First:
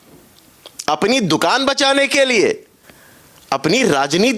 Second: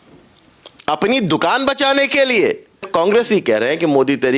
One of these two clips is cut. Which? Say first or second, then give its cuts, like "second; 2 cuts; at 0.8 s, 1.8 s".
second; 1 cut; at 2.9 s